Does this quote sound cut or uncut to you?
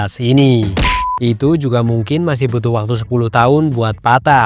cut